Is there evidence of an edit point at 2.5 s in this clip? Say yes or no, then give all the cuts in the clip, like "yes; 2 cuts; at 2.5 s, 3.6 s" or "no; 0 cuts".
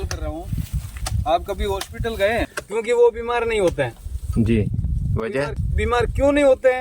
yes; 1 cut; at 2.5 s